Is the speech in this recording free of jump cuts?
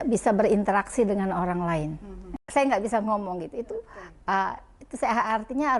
no; 1 cut; at 2.5 s

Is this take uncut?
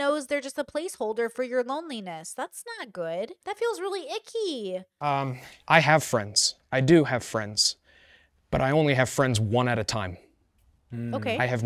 no; 2 cuts; at 3.4 s, 4.9 s

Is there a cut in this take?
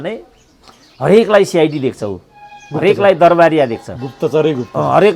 no; 0 cuts

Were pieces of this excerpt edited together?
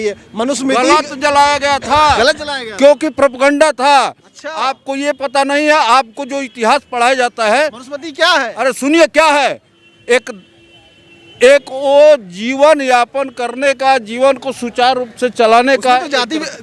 no; 0 cuts

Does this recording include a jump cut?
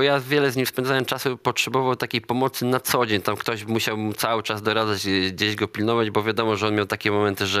no; 0 cuts

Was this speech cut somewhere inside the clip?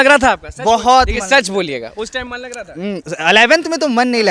no; 0 cuts

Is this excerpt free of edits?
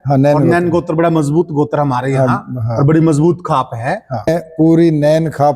no; 1 cut; at 4.3 s

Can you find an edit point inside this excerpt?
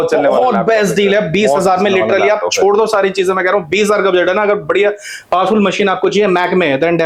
no; 0 cuts

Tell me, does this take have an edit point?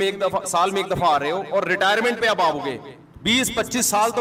no; 0 cuts

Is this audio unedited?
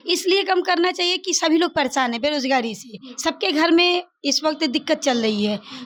yes; 0 cuts

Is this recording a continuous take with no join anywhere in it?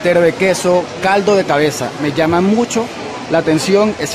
yes; 0 cuts

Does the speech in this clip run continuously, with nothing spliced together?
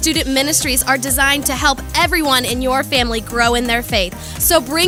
yes; 0 cuts

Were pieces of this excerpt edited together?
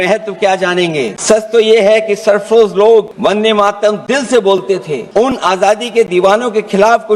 yes; 3 cuts; at 1.2 s, 3.1 s, 5.0 s

